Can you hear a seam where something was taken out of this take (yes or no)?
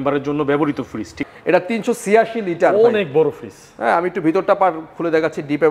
yes